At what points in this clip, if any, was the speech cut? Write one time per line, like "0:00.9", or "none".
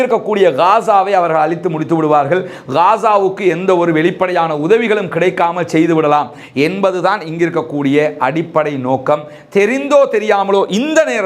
none